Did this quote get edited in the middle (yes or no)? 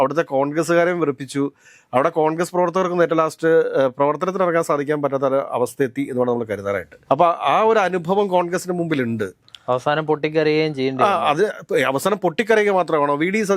no